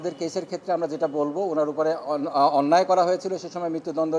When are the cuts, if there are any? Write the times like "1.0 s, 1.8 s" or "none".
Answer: none

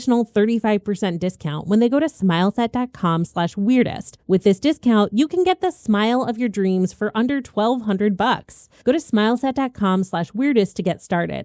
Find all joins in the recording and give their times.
none

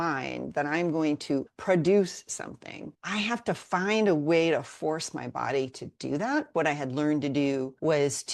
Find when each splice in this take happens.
1.5 s, 6.5 s

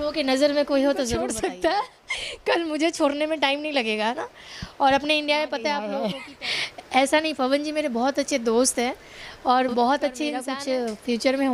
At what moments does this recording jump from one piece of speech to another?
1.3 s, 6.1 s, 10.5 s

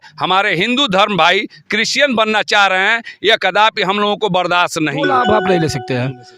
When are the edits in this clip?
5.1 s

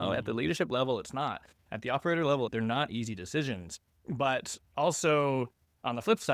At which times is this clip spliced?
2.5 s

